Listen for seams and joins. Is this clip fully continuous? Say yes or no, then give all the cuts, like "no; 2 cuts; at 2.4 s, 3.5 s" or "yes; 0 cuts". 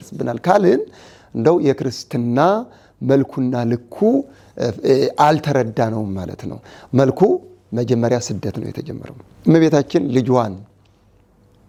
yes; 0 cuts